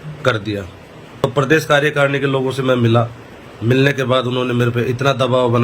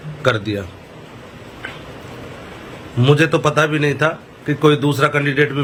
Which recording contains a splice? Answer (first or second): first